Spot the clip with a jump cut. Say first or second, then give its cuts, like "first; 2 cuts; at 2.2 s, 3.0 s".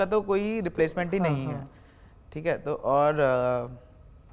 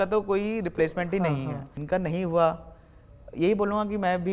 second; 1 cut; at 1.8 s